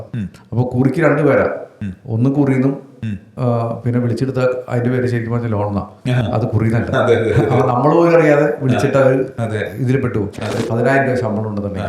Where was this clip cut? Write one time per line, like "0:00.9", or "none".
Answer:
0:10.5